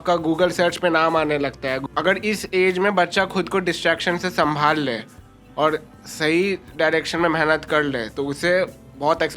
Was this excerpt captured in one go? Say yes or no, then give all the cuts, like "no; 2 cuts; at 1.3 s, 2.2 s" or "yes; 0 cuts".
no; 1 cut; at 1.8 s